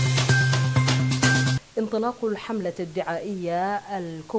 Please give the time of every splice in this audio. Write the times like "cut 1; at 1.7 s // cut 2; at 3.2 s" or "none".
cut 1; at 1.5 s